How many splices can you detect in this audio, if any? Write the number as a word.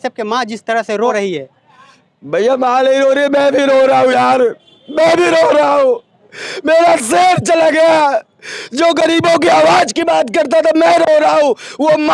one